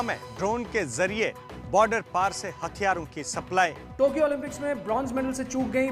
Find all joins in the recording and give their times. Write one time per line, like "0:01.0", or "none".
0:03.8